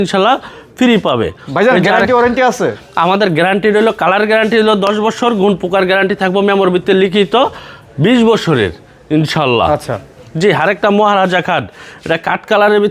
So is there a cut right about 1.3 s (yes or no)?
no